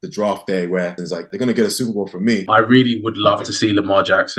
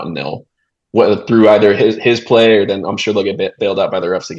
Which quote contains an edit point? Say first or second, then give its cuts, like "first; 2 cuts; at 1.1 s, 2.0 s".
first; 2 cuts; at 1.0 s, 2.4 s